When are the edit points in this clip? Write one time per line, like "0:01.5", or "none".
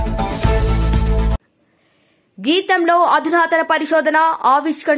0:01.2